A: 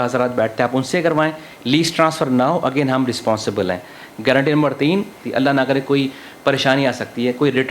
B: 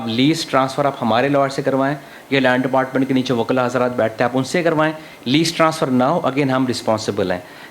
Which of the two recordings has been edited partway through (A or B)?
A